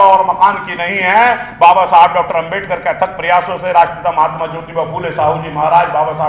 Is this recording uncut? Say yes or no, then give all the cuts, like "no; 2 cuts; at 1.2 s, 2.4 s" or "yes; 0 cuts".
yes; 0 cuts